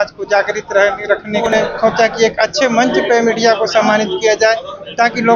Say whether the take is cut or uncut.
cut